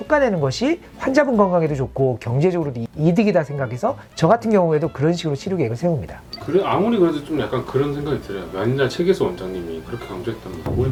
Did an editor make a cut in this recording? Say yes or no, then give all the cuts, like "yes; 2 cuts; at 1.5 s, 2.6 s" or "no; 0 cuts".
no; 0 cuts